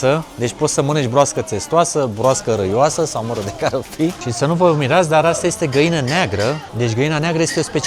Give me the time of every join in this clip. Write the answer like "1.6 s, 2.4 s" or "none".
4.2 s, 6.7 s